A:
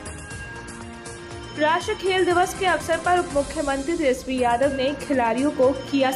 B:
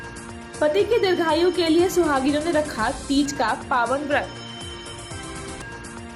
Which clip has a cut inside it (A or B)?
A